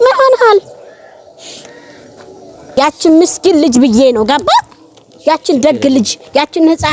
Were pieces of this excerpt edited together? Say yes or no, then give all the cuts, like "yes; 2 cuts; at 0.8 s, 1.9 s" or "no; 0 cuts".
yes; 1 cut; at 2.7 s